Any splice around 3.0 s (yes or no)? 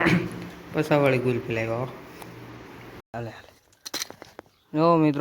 yes